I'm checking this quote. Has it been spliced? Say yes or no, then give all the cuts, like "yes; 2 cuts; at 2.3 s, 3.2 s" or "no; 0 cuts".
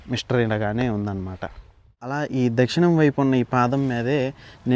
yes; 1 cut; at 2.2 s